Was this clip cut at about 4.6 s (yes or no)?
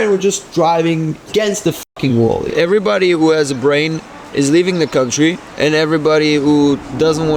no